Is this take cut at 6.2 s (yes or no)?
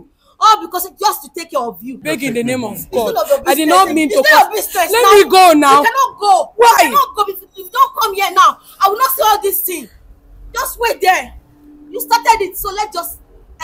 no